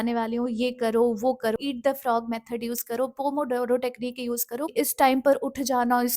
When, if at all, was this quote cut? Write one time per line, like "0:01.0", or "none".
0:01.5
0:04.7